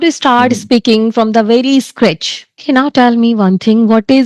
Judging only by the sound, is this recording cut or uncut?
cut